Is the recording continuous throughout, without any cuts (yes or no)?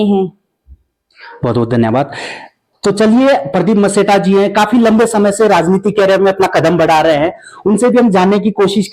yes